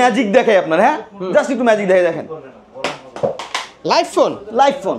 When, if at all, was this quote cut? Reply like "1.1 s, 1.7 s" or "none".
none